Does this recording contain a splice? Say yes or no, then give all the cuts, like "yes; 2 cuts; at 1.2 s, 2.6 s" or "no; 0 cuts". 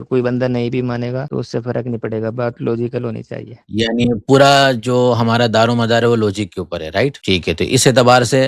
yes; 1 cut; at 7.2 s